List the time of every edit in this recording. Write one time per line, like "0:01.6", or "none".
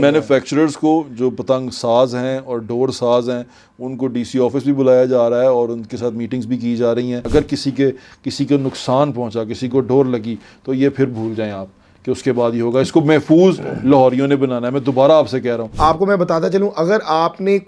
0:07.2
0:15.7